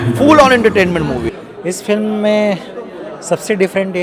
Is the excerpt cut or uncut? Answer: uncut